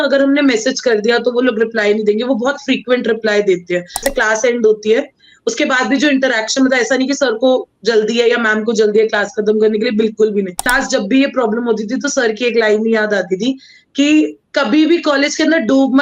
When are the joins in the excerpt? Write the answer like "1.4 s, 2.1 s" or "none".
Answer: 4.0 s, 10.7 s